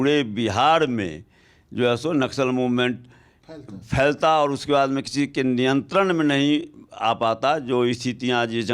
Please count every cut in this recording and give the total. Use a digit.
0